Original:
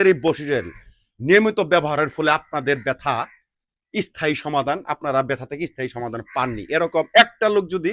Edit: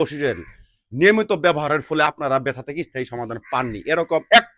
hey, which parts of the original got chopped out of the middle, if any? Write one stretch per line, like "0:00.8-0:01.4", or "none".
0:02.3-0:04.9

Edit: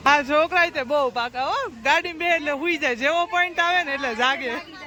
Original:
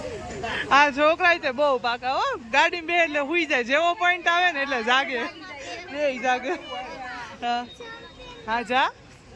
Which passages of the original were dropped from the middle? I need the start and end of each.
none

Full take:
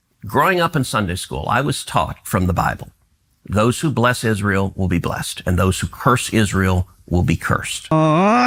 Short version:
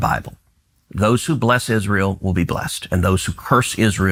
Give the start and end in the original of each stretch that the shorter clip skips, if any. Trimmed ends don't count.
none

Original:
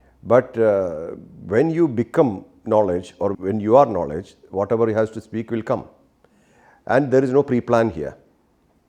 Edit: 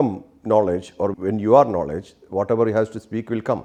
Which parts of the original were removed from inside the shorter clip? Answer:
none

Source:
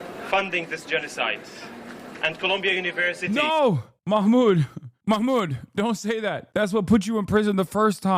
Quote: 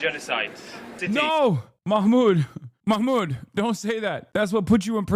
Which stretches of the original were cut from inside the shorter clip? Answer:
0:01.9-0:03.2

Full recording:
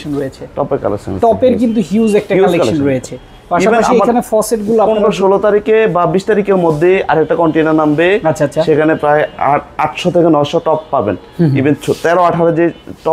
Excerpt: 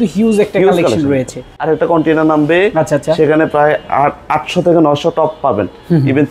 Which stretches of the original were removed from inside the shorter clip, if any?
0:03.4-0:07.1

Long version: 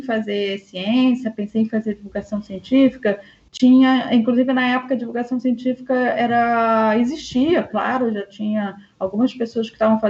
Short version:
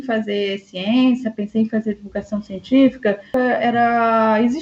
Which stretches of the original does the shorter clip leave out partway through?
0:03.3-0:05.8

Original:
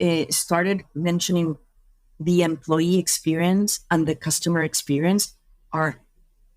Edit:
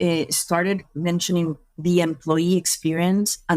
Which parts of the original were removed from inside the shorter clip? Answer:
0:01.7-0:02.1

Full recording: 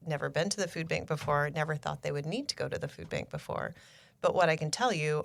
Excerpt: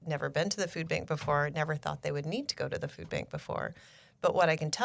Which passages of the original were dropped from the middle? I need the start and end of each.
none

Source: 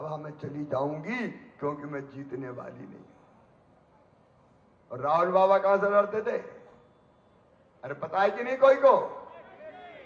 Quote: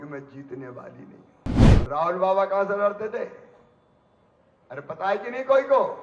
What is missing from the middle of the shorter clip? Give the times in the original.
0:03.5-0:04.8

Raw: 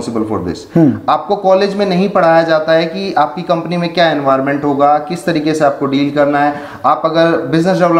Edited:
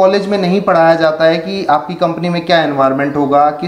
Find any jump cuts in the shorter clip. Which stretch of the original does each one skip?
none

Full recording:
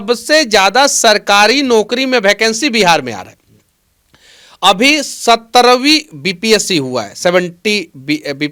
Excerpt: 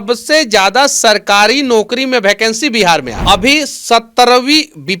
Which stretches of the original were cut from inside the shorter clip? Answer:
0:03.1-0:04.5

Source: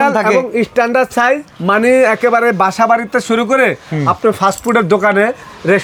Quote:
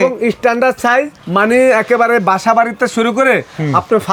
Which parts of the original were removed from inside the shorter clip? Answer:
none

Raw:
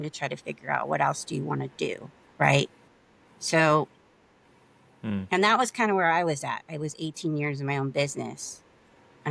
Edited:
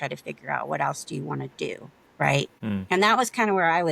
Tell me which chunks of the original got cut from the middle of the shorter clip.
0:02.7-0:05.0

